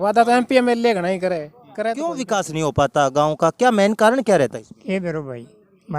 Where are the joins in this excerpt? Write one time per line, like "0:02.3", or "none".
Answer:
0:02.0